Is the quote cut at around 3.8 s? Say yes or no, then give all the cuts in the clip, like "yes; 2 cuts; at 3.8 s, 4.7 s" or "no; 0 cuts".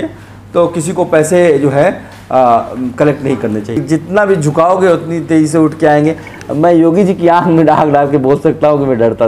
yes; 1 cut; at 3.8 s